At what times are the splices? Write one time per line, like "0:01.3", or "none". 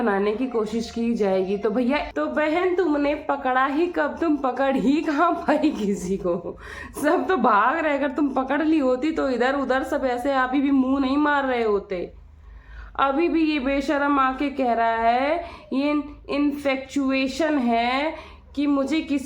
0:02.1